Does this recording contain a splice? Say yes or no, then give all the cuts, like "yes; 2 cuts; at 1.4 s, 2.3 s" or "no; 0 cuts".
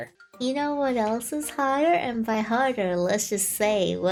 no; 0 cuts